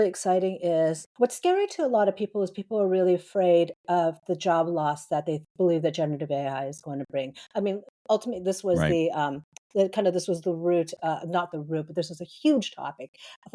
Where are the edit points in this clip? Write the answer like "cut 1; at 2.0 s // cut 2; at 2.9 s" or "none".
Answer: cut 1; at 1.0 s

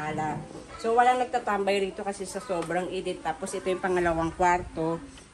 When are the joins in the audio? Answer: none

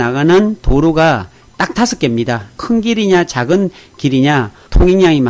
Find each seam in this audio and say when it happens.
cut 1; at 2.6 s

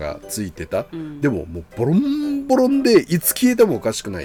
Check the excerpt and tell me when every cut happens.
none

